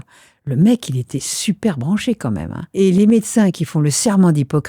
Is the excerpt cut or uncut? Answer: cut